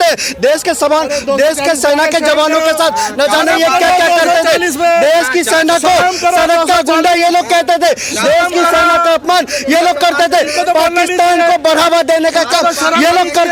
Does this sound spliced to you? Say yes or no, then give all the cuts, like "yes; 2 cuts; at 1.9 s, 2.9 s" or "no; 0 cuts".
no; 0 cuts